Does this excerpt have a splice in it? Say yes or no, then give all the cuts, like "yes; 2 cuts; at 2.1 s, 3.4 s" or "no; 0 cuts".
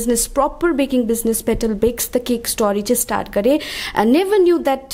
no; 0 cuts